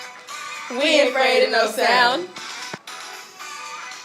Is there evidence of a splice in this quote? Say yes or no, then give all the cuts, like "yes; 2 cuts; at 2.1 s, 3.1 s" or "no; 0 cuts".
yes; 1 cut; at 2.8 s